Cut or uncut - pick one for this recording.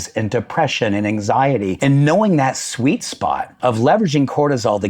cut